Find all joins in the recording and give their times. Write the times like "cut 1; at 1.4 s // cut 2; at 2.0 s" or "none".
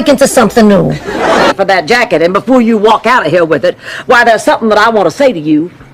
cut 1; at 1.5 s